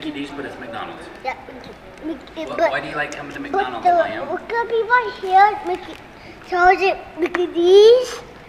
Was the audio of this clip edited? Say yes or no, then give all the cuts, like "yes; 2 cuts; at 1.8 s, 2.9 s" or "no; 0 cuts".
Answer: no; 0 cuts